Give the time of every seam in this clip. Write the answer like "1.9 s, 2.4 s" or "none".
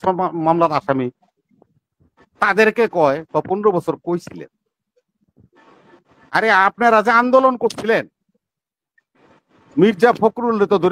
none